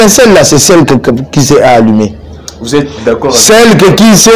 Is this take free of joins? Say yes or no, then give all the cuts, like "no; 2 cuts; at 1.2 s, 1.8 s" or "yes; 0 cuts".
yes; 0 cuts